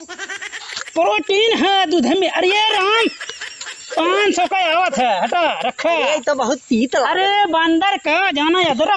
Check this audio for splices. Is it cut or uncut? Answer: uncut